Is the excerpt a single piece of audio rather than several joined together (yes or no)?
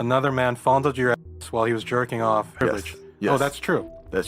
no